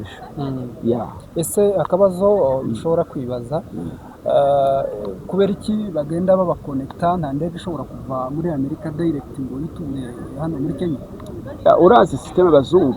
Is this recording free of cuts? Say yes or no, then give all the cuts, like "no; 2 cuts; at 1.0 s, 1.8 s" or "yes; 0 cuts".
yes; 0 cuts